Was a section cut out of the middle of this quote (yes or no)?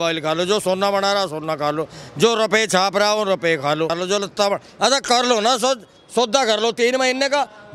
yes